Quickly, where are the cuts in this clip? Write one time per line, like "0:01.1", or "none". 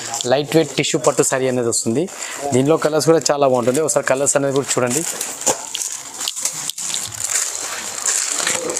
none